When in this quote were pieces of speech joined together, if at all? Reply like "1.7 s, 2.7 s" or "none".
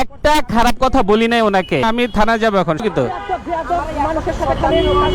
1.8 s, 2.8 s